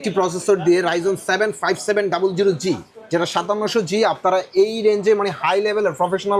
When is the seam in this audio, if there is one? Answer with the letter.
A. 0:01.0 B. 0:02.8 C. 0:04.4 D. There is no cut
D